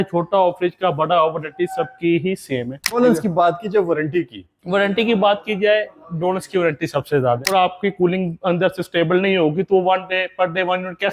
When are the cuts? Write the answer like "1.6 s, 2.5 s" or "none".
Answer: 3.0 s, 7.4 s